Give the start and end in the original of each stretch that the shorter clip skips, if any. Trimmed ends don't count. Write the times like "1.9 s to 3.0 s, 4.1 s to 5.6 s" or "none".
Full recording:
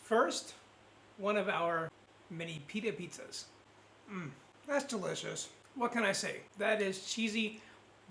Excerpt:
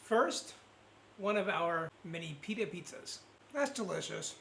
2.0 s to 2.3 s, 3.6 s to 4.5 s